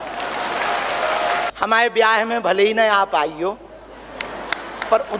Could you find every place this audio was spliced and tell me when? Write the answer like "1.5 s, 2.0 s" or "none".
1.5 s